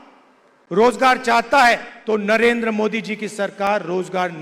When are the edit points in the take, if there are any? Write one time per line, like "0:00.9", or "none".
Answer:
0:01.9